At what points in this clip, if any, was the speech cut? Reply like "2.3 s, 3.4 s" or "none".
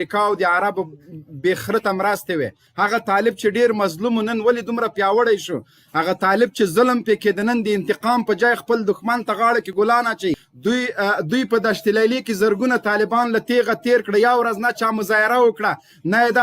2.6 s, 10.5 s